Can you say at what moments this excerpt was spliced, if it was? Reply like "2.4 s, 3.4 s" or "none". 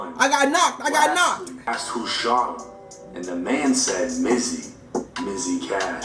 1.7 s